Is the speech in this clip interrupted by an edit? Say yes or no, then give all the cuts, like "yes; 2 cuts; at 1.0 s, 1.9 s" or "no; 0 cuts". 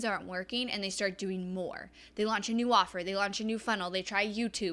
no; 0 cuts